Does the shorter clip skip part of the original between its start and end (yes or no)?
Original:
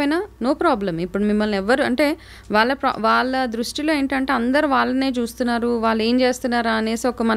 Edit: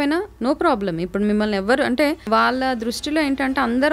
yes